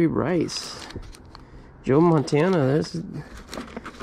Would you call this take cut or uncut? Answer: uncut